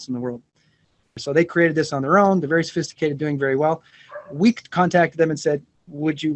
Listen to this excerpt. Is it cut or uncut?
cut